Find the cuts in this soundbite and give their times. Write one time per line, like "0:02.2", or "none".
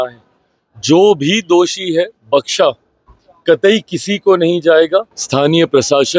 0:05.2